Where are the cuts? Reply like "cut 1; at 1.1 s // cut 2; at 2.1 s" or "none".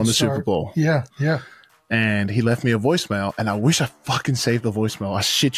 none